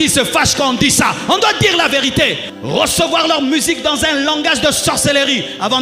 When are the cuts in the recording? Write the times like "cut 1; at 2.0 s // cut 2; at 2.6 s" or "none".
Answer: cut 1; at 2.5 s